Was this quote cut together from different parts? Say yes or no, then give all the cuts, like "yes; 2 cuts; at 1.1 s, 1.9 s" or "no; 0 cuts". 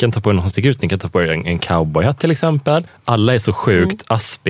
yes; 1 cut; at 2.9 s